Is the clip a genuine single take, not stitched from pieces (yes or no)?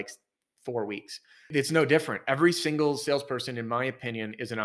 no